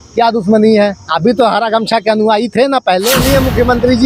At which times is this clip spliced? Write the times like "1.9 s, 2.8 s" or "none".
3.2 s

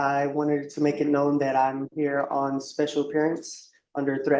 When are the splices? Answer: none

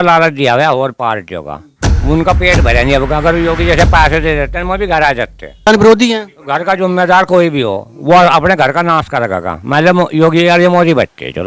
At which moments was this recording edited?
5.7 s

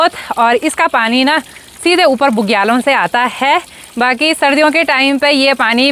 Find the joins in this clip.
none

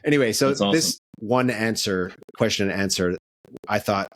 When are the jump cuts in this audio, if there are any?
1.1 s

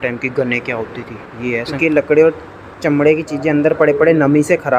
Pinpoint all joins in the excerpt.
1.7 s

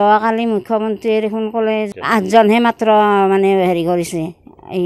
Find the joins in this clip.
1.9 s

